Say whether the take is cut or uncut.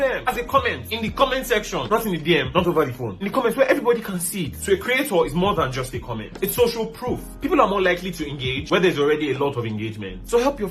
uncut